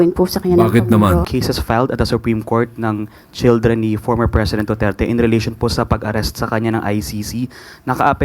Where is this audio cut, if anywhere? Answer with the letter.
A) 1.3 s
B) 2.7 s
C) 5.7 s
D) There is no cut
A